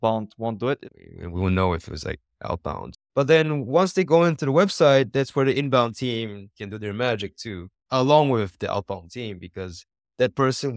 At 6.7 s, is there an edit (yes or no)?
no